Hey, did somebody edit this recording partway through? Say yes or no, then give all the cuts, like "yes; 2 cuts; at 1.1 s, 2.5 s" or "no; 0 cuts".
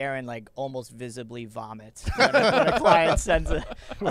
no; 0 cuts